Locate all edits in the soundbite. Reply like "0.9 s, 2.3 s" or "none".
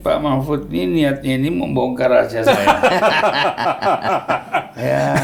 none